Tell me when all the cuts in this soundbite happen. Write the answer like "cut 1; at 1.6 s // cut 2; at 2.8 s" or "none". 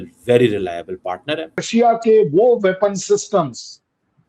cut 1; at 1.7 s